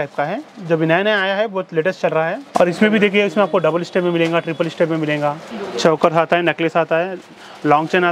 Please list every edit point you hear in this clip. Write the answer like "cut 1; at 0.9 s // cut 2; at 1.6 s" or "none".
cut 1; at 2.5 s // cut 2; at 5.4 s